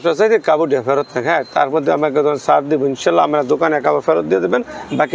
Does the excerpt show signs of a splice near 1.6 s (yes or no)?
no